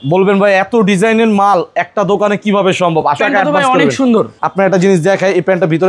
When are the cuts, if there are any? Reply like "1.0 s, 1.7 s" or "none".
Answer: 3.2 s, 4.3 s